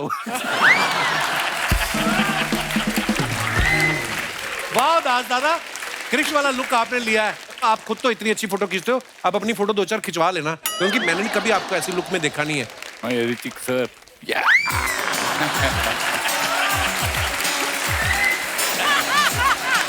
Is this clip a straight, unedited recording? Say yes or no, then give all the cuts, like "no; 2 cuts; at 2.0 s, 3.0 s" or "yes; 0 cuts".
yes; 0 cuts